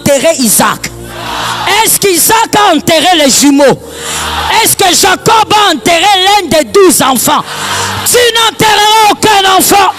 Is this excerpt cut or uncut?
uncut